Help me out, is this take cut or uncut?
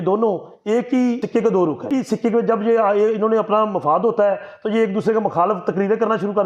cut